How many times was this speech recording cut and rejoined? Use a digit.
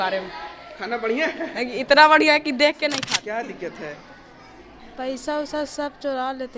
1